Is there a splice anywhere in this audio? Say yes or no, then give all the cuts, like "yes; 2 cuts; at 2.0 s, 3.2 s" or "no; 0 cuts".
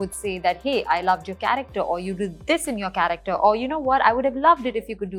no; 0 cuts